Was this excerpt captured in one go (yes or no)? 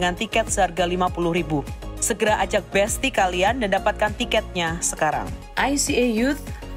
no